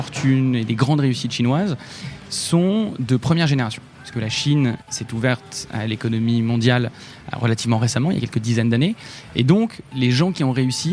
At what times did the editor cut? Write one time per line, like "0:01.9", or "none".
0:04.8
0:09.8